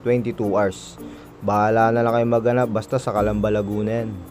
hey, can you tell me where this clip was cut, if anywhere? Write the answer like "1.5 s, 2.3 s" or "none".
none